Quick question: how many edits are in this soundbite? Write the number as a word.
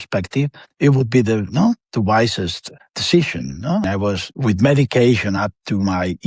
one